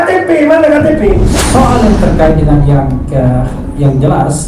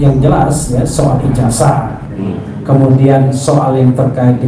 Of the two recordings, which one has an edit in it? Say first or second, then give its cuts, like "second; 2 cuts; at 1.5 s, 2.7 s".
first; 1 cut; at 1.3 s